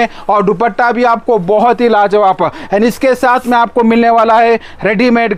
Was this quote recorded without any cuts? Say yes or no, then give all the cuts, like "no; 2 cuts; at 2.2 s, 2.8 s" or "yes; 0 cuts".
yes; 0 cuts